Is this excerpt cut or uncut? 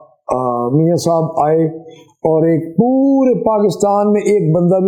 uncut